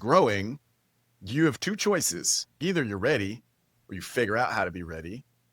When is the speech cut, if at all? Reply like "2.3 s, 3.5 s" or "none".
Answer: 2.6 s